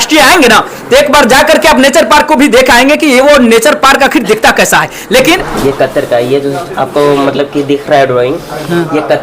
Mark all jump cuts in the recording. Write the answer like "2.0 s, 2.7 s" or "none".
5.5 s